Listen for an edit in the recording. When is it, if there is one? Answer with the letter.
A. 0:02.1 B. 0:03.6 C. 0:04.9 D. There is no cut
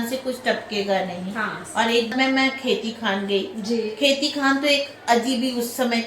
A